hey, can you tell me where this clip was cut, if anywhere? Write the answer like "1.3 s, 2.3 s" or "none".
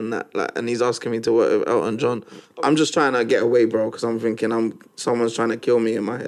2.4 s